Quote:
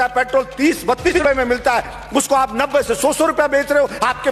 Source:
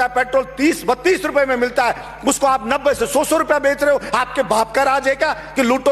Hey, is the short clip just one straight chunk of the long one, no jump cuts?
no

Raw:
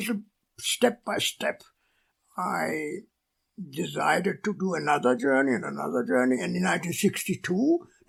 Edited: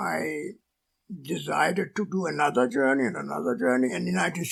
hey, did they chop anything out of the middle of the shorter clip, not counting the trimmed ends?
no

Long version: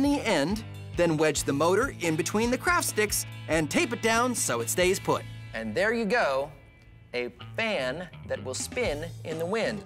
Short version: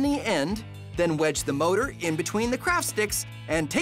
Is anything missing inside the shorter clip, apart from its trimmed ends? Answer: no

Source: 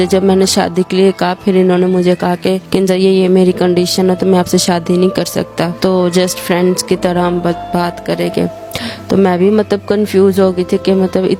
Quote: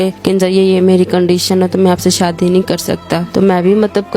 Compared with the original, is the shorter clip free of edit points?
no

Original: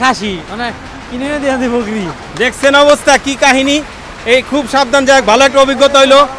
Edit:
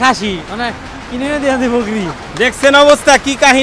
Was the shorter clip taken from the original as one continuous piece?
yes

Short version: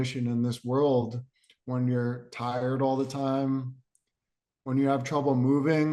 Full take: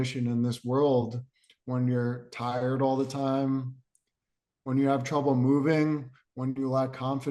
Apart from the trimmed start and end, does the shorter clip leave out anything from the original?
no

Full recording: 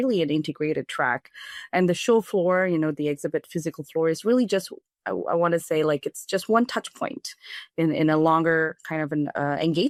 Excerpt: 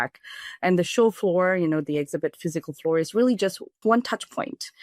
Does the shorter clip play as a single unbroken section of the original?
no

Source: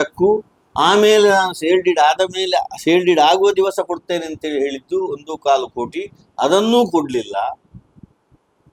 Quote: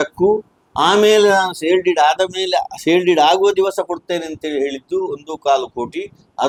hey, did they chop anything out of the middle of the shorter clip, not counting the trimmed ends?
no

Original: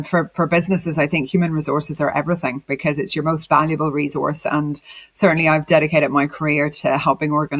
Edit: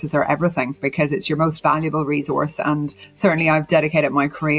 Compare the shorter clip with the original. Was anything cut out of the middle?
yes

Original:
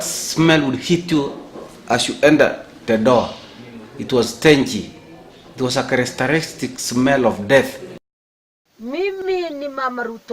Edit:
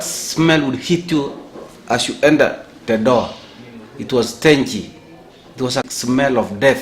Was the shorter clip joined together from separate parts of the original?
yes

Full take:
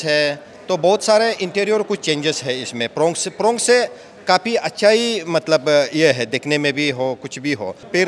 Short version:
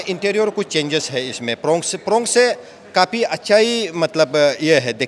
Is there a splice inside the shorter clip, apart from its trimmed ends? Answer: no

